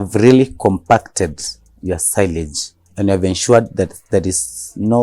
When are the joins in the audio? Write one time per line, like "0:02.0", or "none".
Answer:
0:02.9